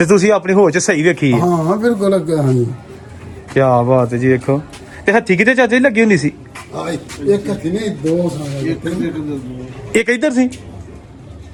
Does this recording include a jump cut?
no; 0 cuts

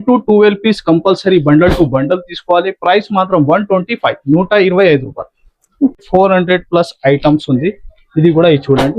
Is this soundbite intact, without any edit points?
no; 1 cut; at 6.0 s

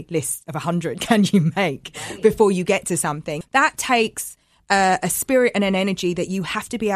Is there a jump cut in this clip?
yes; 1 cut; at 3.4 s

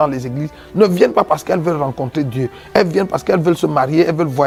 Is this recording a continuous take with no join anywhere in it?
yes; 0 cuts

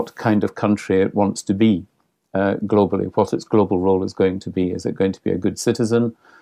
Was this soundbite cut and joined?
no; 0 cuts

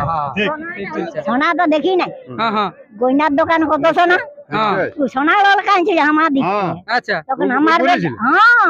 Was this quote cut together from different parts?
yes; 1 cut; at 1.1 s

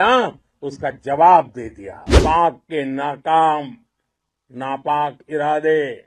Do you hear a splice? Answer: yes; 1 cut; at 2.1 s

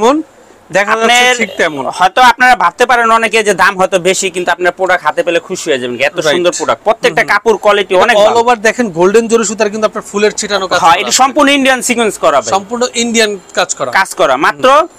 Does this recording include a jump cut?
no; 0 cuts

